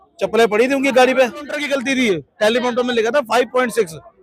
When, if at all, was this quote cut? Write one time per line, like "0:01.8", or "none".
0:01.6